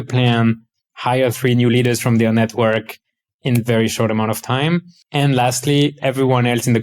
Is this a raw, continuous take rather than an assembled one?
no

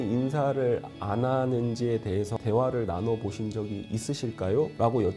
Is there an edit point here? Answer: no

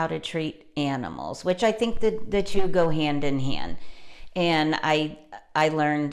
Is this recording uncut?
yes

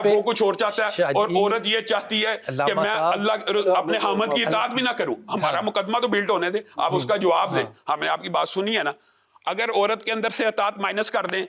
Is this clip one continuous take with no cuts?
yes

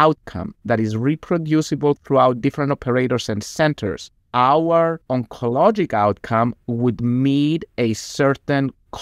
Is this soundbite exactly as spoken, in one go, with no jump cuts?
no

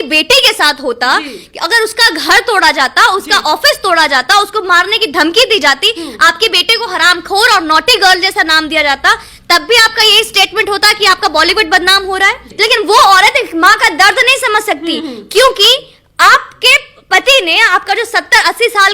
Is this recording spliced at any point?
yes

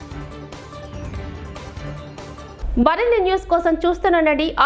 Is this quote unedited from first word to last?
yes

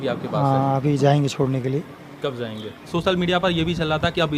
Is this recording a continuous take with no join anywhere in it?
no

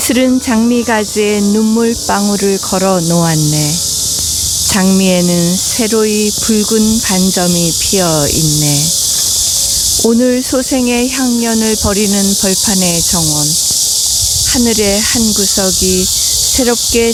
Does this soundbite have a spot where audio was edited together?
no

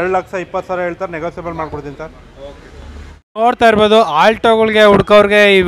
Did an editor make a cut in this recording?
yes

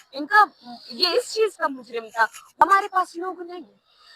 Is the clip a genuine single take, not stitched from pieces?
no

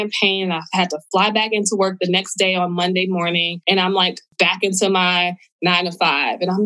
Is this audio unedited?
no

